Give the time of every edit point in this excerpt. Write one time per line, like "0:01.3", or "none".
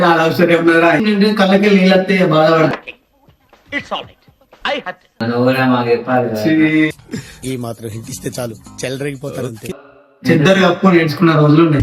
0:01.0
0:05.2
0:09.7